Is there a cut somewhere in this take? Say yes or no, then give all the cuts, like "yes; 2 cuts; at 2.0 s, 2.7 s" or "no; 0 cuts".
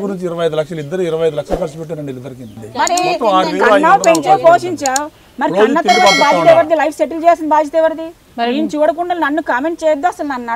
yes; 1 cut; at 2.6 s